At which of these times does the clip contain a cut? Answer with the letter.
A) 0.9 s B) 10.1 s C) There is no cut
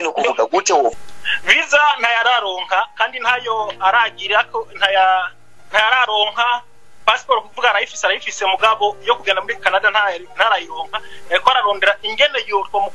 A